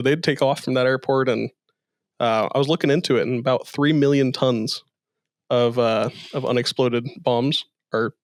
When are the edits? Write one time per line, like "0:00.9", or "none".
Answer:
none